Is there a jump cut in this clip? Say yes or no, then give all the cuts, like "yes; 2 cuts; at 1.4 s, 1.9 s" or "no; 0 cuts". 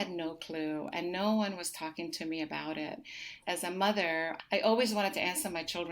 yes; 2 cuts; at 3.4 s, 4.4 s